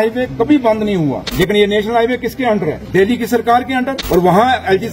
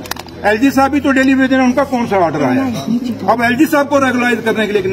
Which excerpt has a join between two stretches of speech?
first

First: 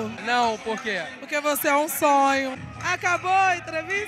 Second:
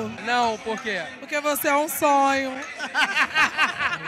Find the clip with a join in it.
first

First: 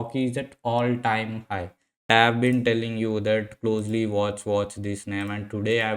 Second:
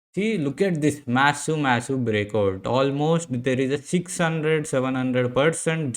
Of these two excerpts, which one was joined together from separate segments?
first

